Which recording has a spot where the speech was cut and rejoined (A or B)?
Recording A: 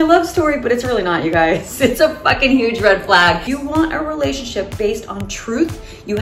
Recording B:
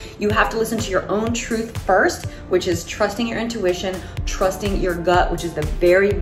A